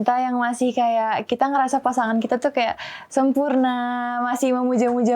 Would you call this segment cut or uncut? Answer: uncut